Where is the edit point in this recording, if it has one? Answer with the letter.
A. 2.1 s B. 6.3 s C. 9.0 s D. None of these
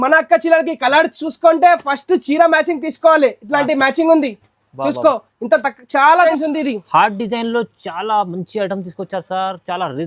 B